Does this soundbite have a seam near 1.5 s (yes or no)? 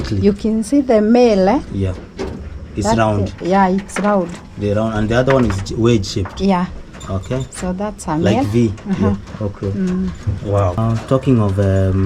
no